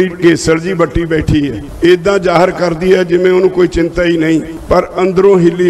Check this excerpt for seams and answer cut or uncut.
cut